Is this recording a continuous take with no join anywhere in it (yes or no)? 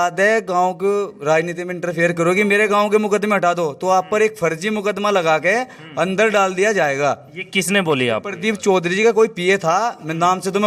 yes